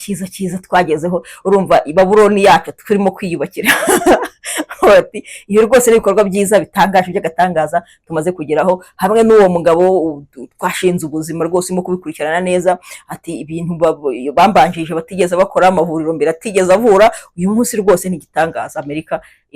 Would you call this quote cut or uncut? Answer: uncut